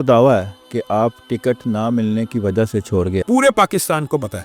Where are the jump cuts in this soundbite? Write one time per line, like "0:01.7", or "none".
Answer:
0:03.2